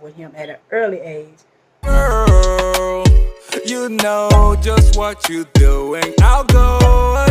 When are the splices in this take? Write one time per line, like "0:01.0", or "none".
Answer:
0:01.9